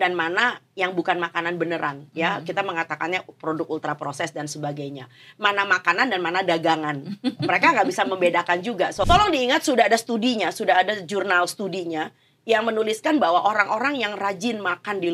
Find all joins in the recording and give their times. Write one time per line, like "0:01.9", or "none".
0:09.0